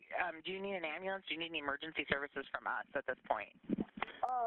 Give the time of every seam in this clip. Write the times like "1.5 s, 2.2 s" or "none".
3.2 s